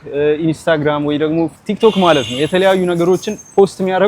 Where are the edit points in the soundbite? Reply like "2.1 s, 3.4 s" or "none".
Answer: none